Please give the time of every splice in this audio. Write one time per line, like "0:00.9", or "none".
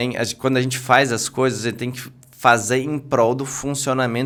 none